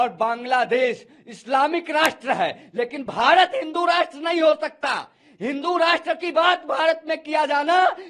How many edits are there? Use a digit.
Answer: 0